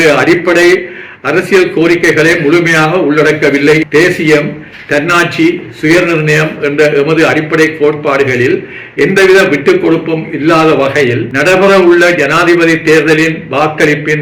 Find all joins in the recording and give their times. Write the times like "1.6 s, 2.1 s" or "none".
3.8 s, 11.3 s